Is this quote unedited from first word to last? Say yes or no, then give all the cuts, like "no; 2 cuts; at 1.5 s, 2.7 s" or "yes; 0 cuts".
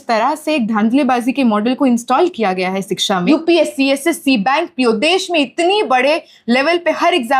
no; 1 cut; at 3.2 s